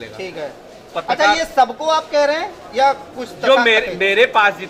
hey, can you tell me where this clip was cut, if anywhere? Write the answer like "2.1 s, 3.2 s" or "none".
none